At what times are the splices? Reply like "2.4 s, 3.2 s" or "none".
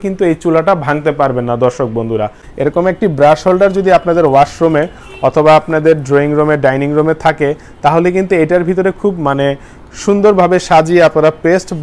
2.4 s